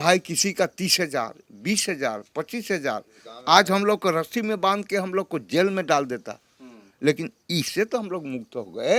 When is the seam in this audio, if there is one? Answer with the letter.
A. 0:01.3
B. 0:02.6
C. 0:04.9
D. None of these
D